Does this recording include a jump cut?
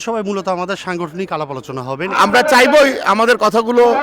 yes; 1 cut; at 2.1 s

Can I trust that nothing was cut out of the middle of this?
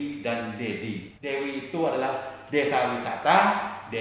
no; 1 cut; at 1.1 s

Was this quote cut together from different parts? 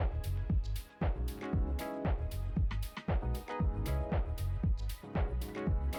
no; 0 cuts

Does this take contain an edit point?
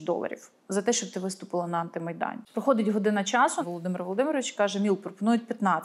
yes; 2 cuts; at 2.4 s, 3.6 s

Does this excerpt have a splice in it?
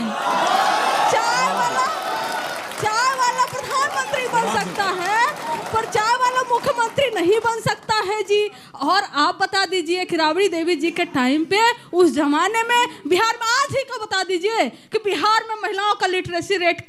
no; 0 cuts

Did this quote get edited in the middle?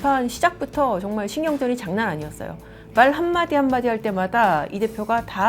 no; 0 cuts

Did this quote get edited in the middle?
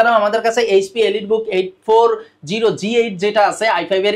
no; 0 cuts

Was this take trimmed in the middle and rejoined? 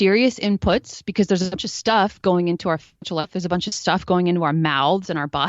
no; 0 cuts

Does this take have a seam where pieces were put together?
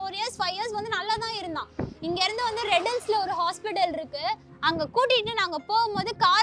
yes; 1 cut; at 4.5 s

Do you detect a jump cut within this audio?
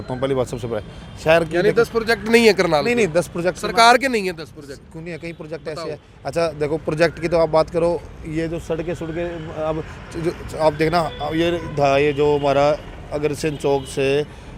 no; 0 cuts

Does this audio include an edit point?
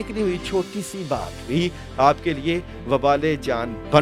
no; 0 cuts

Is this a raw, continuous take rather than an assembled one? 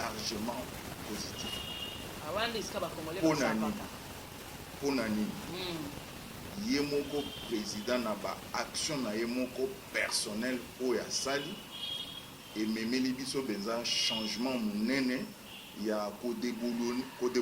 yes; 0 cuts

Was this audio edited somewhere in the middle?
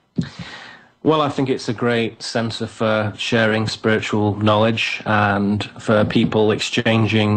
no; 0 cuts

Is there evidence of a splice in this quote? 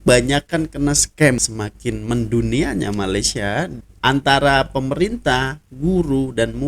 yes; 2 cuts; at 1.4 s, 3.8 s

